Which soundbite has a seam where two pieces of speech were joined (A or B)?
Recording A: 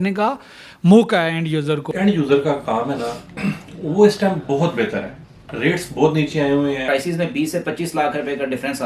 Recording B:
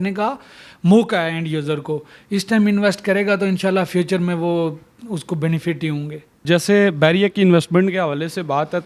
A